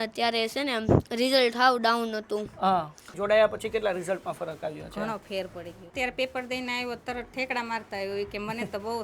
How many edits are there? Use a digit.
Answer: 2